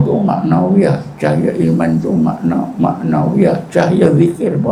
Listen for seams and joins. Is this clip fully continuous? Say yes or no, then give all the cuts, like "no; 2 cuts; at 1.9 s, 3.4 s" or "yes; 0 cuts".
yes; 0 cuts